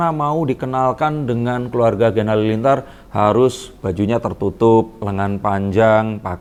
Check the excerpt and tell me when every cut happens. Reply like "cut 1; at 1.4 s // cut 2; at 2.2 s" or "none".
none